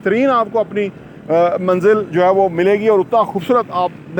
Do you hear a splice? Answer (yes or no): no